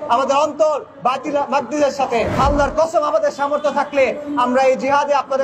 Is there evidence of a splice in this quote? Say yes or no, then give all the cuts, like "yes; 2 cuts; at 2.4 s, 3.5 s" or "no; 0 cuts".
yes; 1 cut; at 2.3 s